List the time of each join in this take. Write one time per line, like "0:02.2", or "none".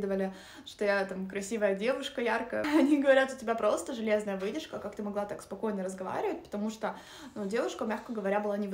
0:02.6